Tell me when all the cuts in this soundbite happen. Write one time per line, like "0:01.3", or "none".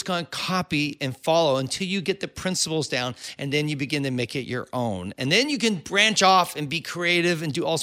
none